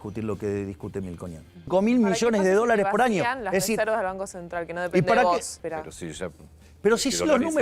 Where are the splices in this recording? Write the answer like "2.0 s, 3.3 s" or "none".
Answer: 1.7 s, 5.6 s